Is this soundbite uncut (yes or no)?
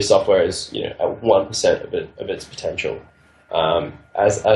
yes